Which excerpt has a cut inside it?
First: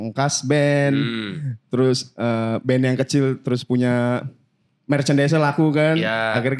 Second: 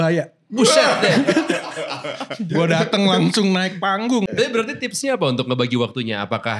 second; 1 cut; at 4.3 s

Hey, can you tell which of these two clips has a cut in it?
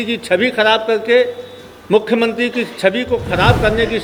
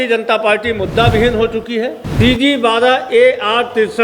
second; 1 cut; at 2.0 s

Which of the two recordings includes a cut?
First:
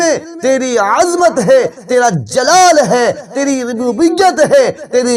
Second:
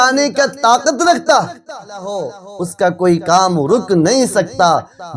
second; 1 cut; at 2.2 s

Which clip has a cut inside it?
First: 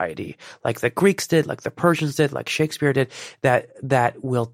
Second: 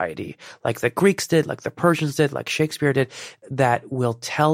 second; 1 cut; at 3.4 s

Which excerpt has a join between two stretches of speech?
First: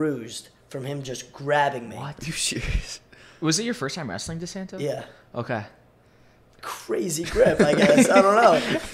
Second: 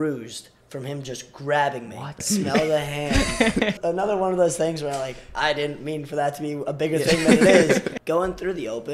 second; 3 cuts; at 2.2 s, 3.8 s, 8.0 s

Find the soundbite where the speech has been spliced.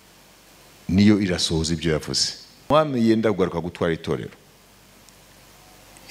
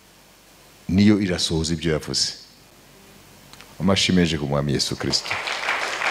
first; 1 cut; at 2.7 s

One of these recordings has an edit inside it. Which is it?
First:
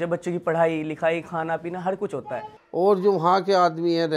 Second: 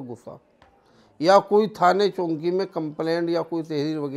first; 1 cut; at 2.4 s

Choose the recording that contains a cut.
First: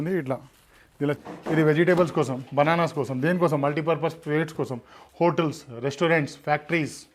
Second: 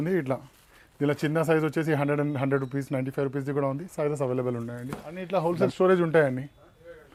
first; 1 cut; at 1.2 s

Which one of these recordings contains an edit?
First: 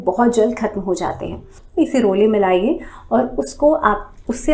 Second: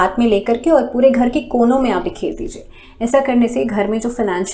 first; 1 cut; at 1.6 s

